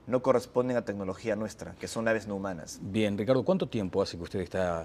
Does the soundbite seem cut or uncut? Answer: uncut